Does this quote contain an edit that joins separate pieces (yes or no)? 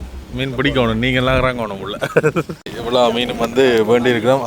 yes